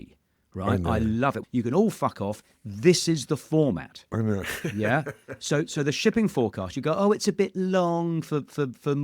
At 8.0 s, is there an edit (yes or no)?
no